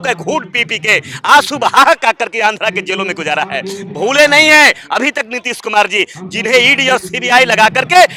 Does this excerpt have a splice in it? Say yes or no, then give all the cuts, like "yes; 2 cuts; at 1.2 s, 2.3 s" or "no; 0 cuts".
no; 0 cuts